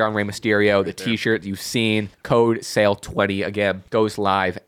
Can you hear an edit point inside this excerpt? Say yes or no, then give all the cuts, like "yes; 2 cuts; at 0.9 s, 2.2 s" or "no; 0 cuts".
yes; 2 cuts; at 2.2 s, 3.8 s